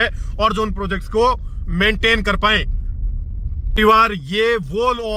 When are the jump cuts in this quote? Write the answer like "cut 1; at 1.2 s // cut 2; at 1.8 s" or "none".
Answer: none